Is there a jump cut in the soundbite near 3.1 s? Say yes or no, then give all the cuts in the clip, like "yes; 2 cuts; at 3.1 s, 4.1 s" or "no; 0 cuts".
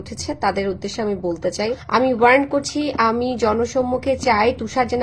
no; 1 cut; at 1.8 s